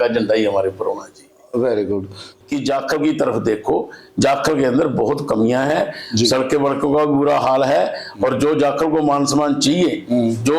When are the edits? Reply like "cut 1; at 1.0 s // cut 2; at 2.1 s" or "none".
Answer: cut 1; at 2.3 s